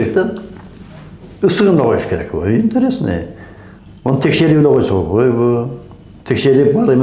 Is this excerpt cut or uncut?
uncut